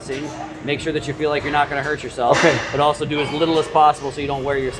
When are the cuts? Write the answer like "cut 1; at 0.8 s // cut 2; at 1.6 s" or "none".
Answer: none